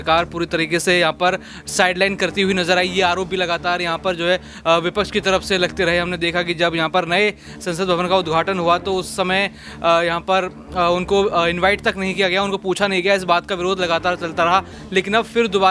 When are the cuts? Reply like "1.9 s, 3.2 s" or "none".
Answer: none